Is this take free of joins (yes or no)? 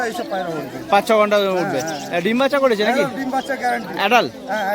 yes